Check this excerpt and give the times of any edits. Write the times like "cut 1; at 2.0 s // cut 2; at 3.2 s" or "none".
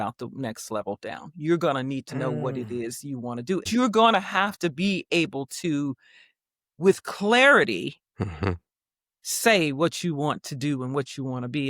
cut 1; at 3.6 s